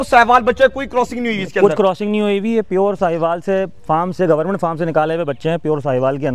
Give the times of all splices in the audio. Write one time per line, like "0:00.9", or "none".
none